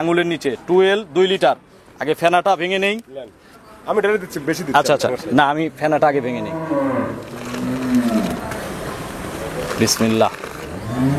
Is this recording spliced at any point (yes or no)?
no